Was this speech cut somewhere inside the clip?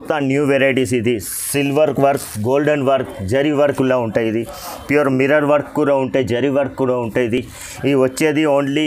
no; 0 cuts

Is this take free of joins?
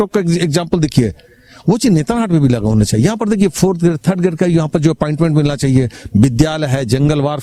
yes; 0 cuts

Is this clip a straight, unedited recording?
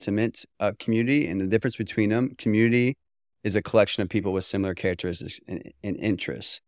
yes; 0 cuts

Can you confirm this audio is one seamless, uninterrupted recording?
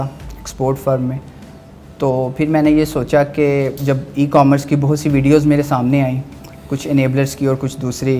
yes; 0 cuts

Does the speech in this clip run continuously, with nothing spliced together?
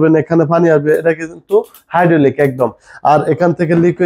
yes; 0 cuts

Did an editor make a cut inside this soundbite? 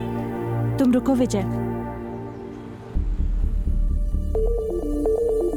no; 0 cuts

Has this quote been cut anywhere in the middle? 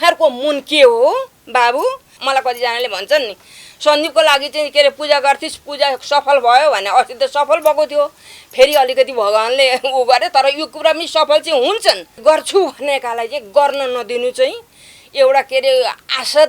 yes; 2 cuts; at 2.2 s, 12.2 s

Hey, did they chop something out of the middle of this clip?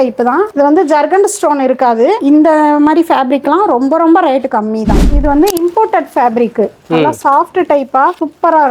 yes; 1 cut; at 5.0 s

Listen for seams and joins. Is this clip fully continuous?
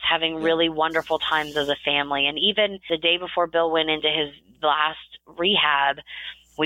no; 1 cut; at 2.8 s

